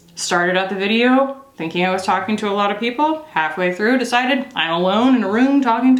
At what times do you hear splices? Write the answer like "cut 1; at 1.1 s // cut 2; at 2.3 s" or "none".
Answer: none